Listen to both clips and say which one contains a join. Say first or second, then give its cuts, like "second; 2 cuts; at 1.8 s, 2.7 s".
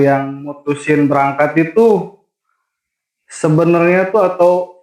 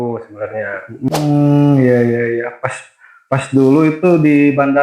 second; 1 cut; at 1.1 s